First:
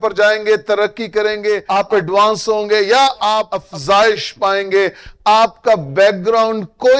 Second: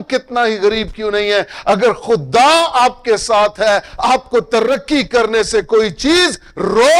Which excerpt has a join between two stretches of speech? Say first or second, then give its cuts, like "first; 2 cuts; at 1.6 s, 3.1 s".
first; 2 cuts; at 1.6 s, 3.6 s